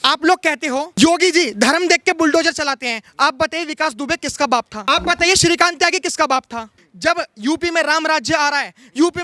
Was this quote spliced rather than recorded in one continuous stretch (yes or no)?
yes